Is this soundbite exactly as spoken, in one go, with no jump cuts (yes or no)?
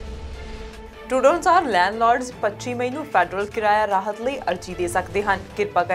no